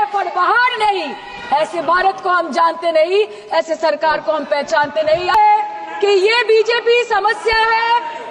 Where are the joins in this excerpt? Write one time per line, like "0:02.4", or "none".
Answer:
0:05.3